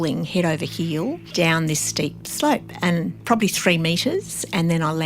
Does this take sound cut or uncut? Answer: cut